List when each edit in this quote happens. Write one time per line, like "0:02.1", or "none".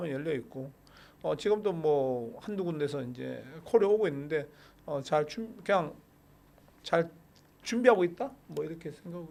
none